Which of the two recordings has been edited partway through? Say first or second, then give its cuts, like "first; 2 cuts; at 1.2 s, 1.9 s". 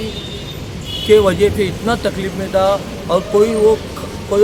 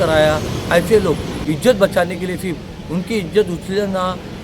second; 1 cut; at 1.3 s